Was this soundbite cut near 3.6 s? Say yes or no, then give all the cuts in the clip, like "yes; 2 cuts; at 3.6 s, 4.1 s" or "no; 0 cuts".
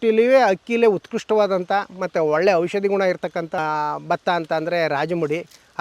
yes; 1 cut; at 3.6 s